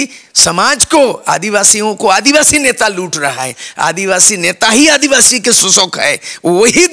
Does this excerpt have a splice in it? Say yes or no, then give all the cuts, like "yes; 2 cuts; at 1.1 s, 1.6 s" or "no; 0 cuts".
no; 0 cuts